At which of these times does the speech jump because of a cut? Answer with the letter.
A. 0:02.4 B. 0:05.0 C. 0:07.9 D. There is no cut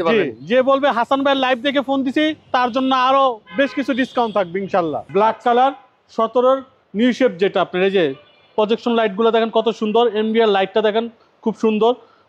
B